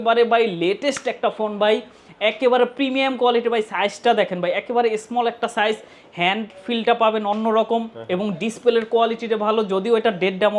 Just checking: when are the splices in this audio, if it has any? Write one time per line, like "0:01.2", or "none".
none